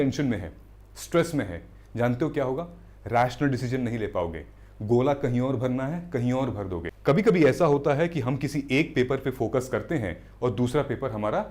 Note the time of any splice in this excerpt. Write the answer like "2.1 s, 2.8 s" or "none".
6.9 s